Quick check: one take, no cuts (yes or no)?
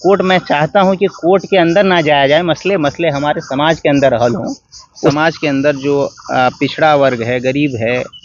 no